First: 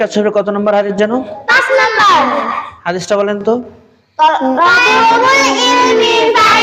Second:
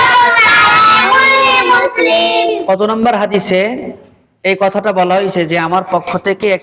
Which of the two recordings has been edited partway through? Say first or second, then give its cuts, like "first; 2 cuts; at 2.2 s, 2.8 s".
second; 1 cut; at 2.6 s